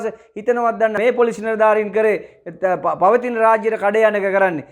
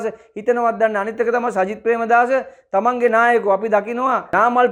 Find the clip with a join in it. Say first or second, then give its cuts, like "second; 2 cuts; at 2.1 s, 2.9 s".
first; 1 cut; at 1.0 s